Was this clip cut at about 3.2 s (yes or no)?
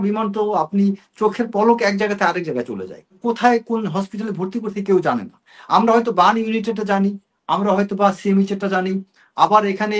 yes